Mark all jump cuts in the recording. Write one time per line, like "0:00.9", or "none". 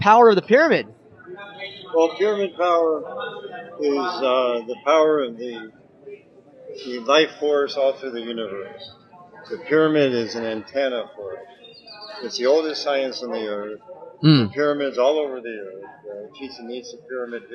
0:15.7

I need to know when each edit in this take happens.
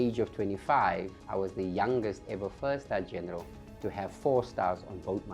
0:01.2

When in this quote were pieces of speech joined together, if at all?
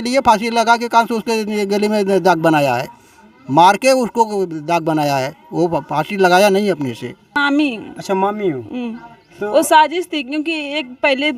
0:07.4

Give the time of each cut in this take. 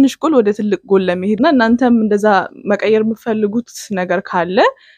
0:01.4

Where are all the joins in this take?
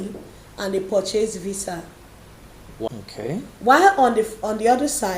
0:02.9

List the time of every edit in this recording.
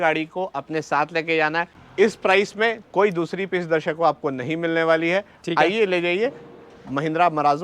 0:01.8

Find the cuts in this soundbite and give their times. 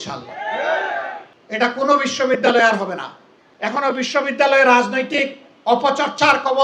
0:01.3
0:03.7

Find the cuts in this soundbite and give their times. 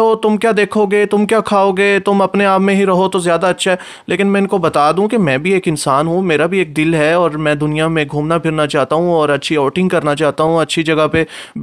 none

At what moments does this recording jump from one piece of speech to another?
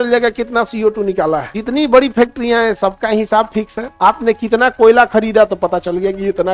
0:01.5
0:03.8

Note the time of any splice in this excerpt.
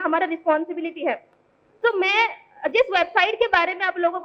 none

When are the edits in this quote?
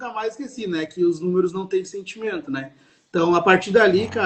none

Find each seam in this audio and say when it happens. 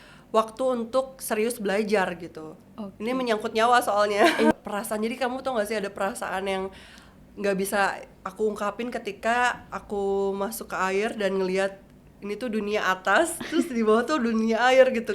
0:04.5

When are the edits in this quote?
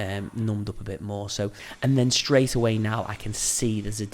0:01.6

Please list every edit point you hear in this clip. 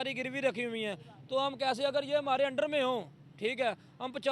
none

